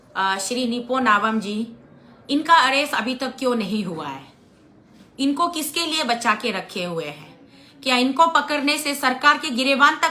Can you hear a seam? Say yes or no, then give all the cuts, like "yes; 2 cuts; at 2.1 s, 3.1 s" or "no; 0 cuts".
no; 0 cuts